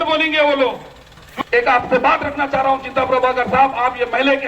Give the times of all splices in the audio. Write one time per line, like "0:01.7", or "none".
0:01.2